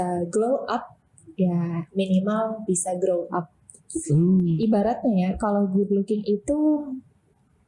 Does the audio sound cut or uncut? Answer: cut